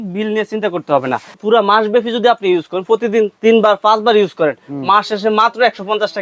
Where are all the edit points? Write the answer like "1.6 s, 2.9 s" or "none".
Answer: 1.3 s